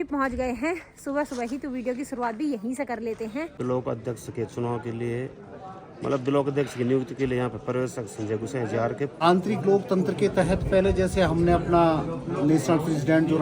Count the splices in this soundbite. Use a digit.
2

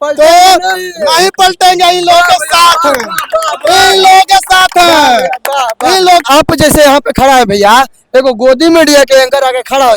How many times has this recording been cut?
1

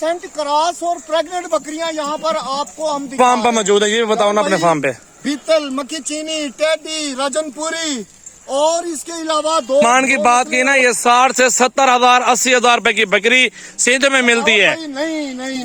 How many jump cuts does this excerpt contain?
2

